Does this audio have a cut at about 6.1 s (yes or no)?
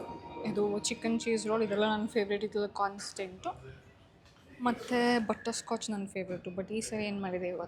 no